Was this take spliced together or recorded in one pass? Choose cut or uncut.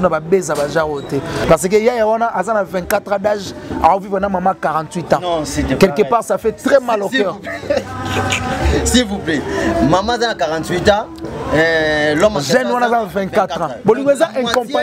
cut